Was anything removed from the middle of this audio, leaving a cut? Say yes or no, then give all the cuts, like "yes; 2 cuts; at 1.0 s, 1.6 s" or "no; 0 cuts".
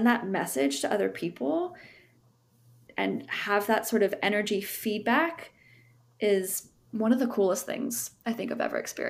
no; 0 cuts